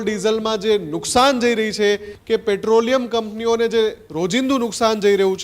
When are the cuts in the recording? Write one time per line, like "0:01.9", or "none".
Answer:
0:02.1